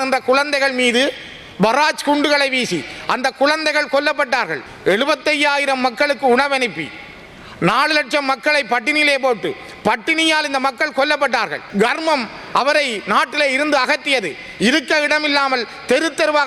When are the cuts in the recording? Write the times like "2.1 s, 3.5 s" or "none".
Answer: 4.6 s, 11.6 s